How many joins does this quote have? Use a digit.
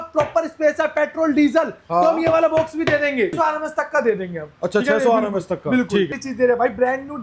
2